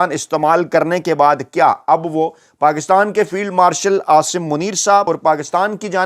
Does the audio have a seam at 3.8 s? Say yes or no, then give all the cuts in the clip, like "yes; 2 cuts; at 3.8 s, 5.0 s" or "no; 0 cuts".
no; 1 cut; at 5.1 s